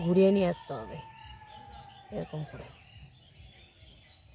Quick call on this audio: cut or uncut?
uncut